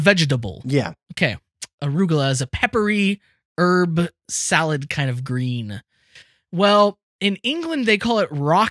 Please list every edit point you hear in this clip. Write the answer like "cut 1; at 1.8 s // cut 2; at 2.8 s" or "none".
cut 1; at 7.1 s